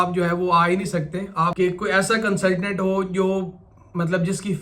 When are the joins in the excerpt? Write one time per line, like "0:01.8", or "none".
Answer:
0:01.5